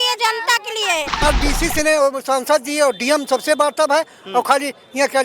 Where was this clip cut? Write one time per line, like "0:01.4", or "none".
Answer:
0:01.2